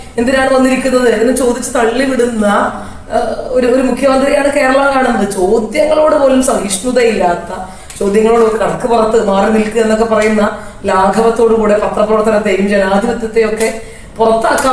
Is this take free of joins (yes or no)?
yes